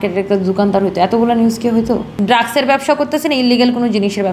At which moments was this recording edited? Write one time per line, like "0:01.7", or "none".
0:02.1